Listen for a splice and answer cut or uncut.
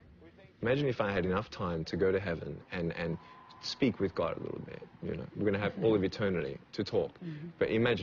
uncut